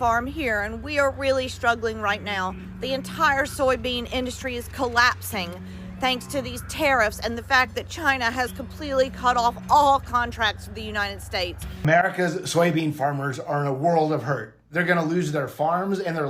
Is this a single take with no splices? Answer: no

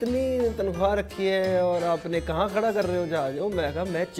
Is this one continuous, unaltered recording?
yes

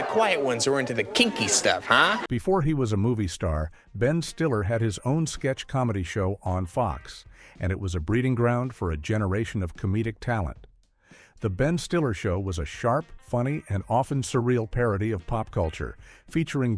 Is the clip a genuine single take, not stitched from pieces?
yes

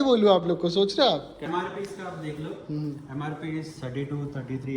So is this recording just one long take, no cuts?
no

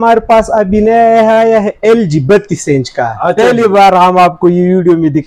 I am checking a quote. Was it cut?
no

